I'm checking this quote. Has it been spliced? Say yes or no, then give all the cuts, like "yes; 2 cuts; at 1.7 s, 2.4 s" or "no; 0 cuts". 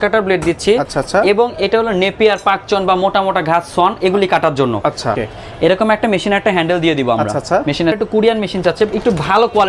yes; 2 cuts; at 5.2 s, 8.0 s